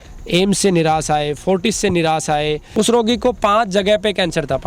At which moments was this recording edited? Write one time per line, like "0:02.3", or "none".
0:02.6